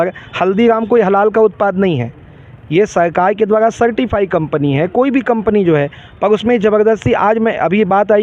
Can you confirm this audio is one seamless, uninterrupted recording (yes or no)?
yes